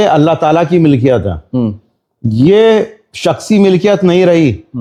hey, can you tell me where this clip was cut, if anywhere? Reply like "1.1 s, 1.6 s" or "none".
none